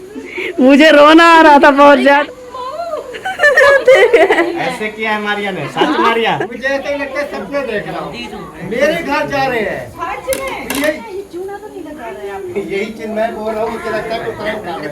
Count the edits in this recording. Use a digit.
3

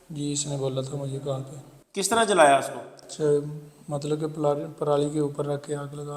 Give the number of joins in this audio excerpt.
0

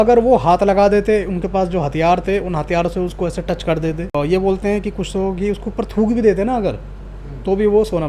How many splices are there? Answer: 1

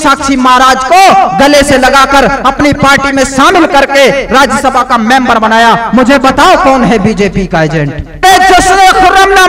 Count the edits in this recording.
1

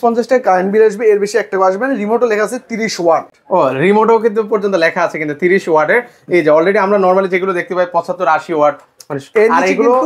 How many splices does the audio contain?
0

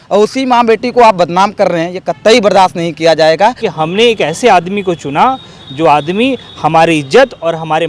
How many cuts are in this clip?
1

